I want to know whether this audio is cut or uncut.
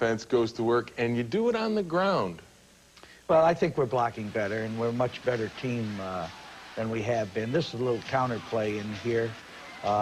uncut